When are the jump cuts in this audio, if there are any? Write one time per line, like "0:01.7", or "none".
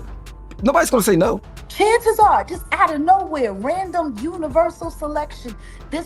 0:01.6